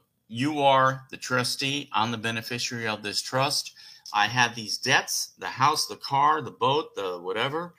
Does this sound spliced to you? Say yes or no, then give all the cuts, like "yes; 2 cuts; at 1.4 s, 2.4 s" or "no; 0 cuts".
no; 0 cuts